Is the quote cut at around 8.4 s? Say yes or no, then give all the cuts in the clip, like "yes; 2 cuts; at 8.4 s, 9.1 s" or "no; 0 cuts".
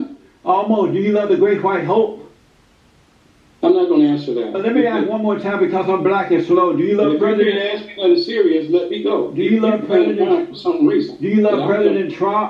no; 1 cut; at 4.6 s